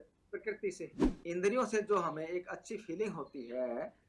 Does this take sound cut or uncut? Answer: cut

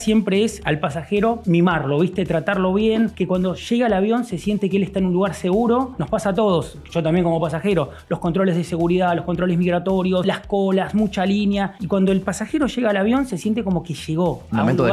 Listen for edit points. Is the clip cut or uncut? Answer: uncut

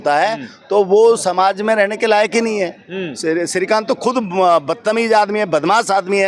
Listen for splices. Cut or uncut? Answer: uncut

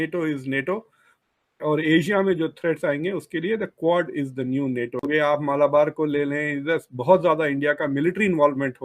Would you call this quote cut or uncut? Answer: cut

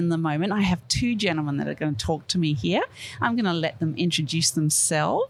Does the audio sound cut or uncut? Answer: uncut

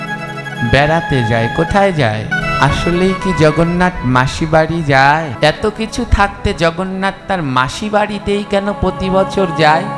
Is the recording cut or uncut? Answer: cut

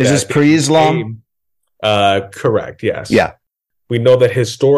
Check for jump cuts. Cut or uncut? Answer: cut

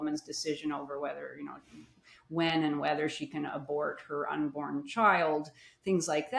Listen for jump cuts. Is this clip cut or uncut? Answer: uncut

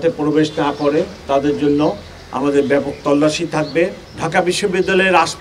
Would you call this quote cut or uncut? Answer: cut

